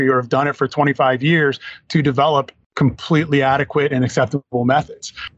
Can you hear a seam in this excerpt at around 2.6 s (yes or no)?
yes